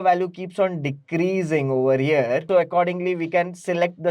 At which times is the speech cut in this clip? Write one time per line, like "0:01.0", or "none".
0:02.5